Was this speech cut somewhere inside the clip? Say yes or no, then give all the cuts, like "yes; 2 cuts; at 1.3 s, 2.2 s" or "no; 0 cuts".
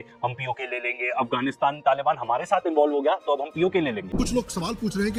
no; 0 cuts